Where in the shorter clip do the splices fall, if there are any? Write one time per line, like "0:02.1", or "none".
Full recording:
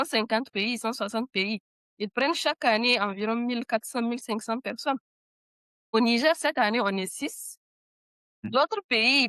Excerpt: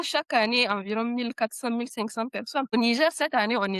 0:02.7